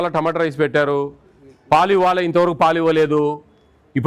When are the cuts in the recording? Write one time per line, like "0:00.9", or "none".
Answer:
none